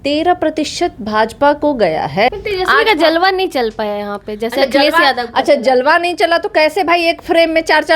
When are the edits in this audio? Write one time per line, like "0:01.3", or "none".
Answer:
0:02.3